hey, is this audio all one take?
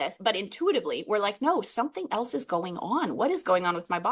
yes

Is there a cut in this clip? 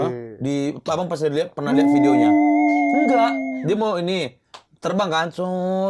no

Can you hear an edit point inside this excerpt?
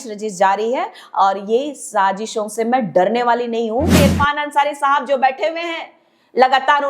yes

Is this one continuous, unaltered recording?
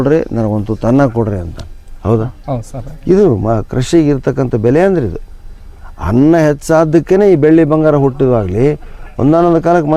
yes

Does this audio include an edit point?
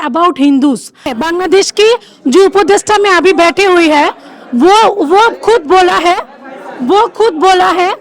yes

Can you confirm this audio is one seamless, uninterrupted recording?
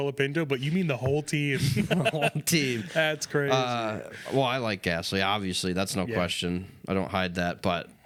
yes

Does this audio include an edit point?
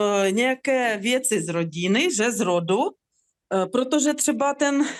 no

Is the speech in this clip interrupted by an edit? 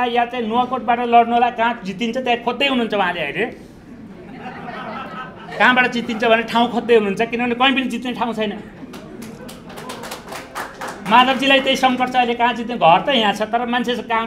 no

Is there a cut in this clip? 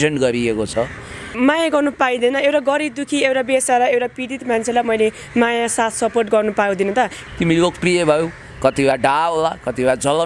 yes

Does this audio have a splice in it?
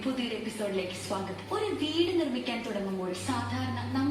no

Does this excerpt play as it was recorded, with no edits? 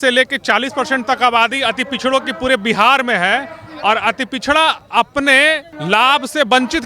no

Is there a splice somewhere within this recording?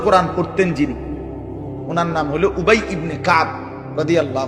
no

